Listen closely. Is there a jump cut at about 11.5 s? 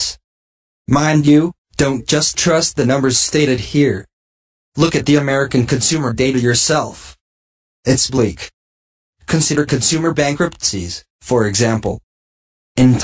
yes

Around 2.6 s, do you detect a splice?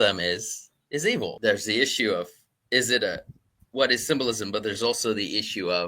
no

